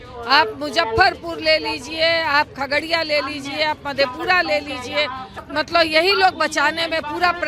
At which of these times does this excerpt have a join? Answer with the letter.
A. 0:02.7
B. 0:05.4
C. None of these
B